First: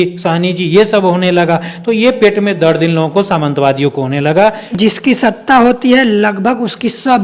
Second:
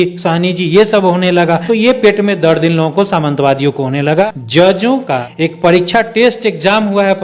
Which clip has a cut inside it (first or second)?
second